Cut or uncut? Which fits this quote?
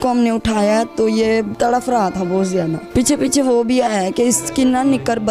cut